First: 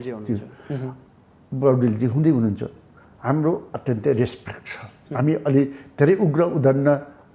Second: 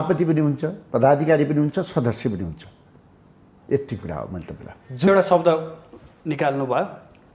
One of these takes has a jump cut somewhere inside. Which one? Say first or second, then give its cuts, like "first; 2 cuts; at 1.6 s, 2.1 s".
second; 1 cut; at 5.1 s